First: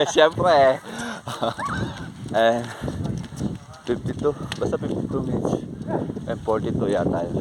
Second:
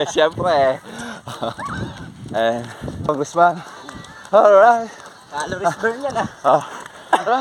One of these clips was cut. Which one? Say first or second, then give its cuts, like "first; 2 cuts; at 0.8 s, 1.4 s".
second; 1 cut; at 3.1 s